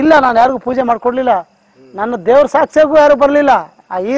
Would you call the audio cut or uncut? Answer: uncut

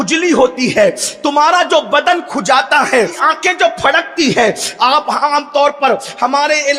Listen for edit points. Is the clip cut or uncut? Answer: cut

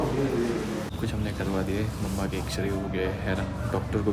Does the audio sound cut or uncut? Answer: cut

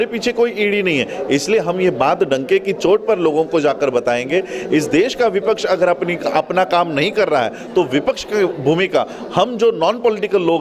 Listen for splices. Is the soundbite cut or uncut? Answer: uncut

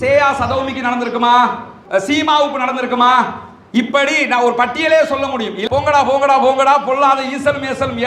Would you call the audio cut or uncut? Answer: cut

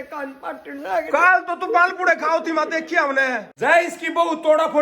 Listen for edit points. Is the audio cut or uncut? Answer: cut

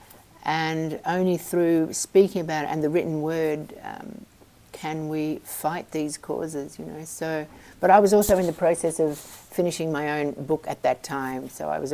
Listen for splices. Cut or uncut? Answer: uncut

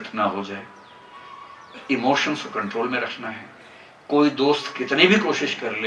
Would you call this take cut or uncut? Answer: uncut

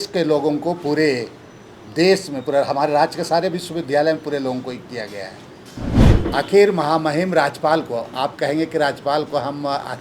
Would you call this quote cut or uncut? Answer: cut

